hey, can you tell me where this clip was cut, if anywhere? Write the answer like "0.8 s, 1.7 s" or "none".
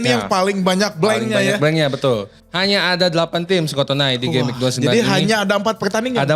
2.4 s